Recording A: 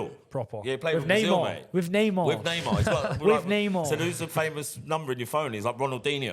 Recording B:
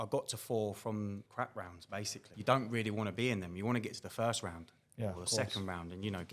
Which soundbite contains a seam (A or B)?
B